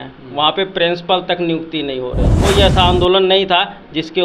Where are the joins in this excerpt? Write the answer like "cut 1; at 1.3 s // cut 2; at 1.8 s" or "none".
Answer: cut 1; at 2.4 s